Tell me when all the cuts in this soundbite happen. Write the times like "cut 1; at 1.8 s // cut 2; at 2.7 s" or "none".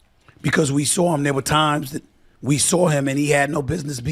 cut 1; at 2.9 s